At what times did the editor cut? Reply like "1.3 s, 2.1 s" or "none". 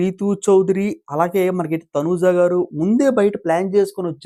none